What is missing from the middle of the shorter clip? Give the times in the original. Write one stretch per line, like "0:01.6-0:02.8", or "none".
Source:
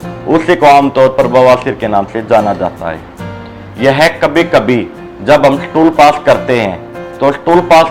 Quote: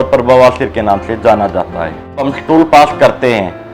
0:03.4-0:05.6